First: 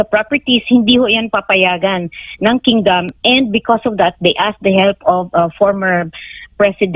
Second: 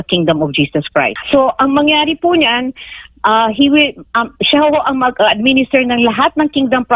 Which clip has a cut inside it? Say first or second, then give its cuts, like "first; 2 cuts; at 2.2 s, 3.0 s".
second; 1 cut; at 1.2 s